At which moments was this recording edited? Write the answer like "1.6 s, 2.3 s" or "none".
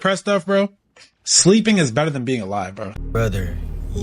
2.9 s